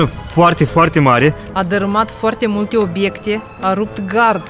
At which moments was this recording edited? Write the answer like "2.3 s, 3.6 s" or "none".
1.4 s